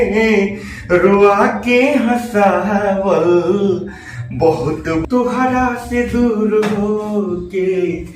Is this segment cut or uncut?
cut